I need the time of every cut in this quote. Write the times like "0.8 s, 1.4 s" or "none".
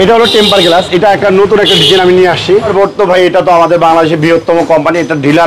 2.7 s

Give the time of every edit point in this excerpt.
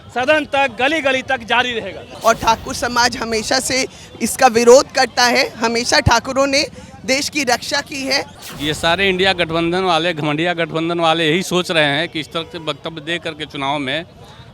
2.0 s, 8.4 s

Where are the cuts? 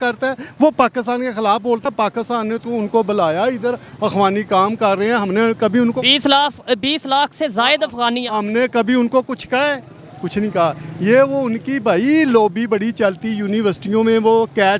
1.8 s

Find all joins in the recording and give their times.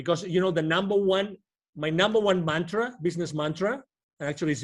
none

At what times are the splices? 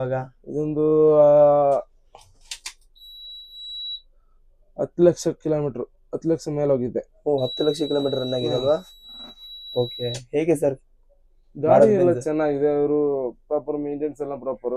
none

